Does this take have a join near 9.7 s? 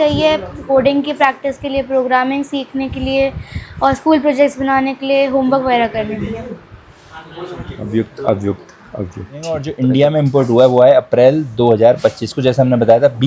yes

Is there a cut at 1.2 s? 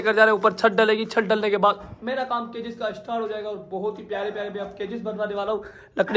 no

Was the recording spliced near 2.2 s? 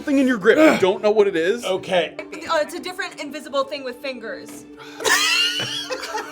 yes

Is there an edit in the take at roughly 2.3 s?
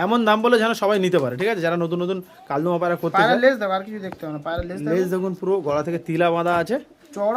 no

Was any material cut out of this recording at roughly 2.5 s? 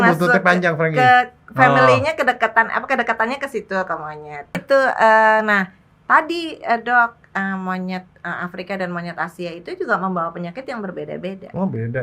no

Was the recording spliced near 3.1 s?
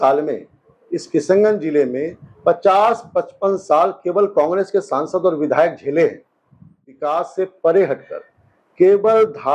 no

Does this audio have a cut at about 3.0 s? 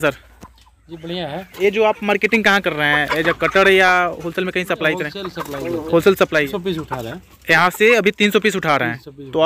no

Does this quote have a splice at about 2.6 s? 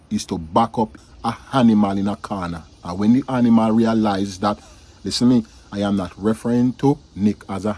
no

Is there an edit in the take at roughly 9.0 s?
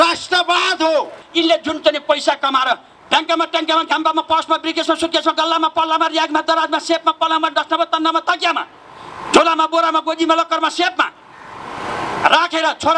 no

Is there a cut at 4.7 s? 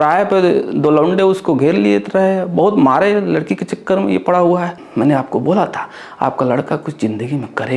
yes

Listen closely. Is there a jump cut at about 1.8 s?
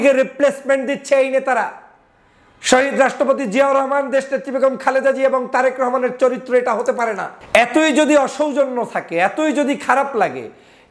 no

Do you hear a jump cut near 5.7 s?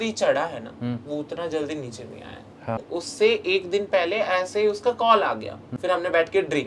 yes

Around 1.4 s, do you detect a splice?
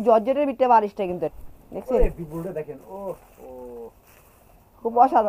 yes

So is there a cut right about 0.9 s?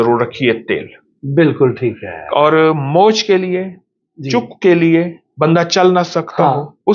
no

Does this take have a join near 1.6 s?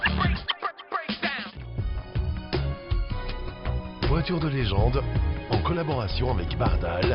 yes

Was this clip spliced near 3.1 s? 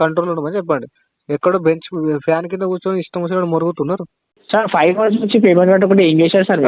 no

